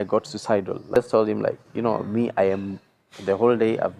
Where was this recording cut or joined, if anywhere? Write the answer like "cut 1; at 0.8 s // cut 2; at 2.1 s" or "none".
cut 1; at 1.0 s